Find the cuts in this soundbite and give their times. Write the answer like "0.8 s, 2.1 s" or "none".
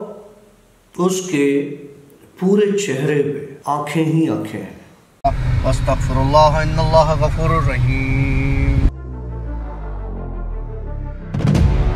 3.5 s, 5.1 s